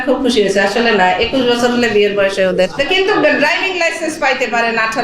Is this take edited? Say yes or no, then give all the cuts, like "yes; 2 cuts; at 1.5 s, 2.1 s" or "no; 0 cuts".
yes; 1 cut; at 2.8 s